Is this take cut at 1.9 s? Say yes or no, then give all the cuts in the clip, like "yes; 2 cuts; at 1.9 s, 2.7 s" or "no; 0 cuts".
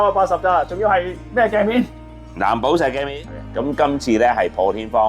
no; 1 cut; at 3.4 s